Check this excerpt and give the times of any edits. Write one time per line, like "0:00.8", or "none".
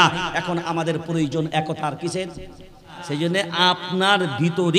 0:03.0